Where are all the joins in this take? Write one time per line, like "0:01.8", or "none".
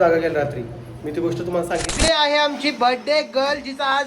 0:01.9